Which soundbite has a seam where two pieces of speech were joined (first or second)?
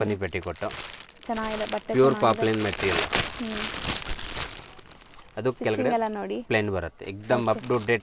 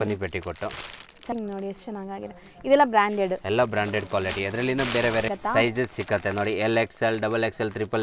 second